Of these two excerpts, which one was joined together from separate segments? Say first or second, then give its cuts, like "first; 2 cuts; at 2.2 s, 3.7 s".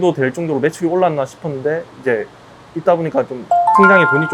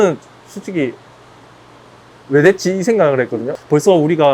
second; 1 cut; at 3.4 s